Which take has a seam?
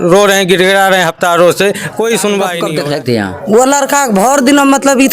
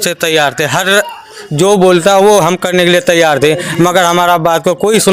first; 1 cut; at 2.6 s

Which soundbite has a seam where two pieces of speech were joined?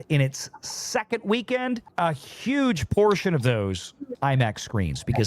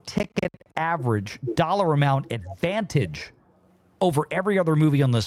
first; 2 cuts; at 1.9 s, 4.1 s

